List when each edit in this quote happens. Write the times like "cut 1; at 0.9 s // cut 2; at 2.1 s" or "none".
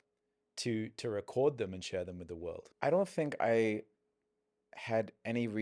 cut 1; at 2.6 s